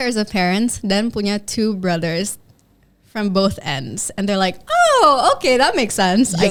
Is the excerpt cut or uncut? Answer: uncut